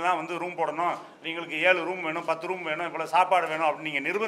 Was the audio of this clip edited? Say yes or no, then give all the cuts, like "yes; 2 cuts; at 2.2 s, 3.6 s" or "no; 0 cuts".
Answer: no; 0 cuts